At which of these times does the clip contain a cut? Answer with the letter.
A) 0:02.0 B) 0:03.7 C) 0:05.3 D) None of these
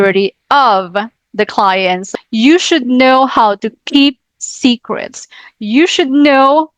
A